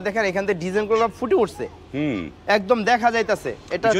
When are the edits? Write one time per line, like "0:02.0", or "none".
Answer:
none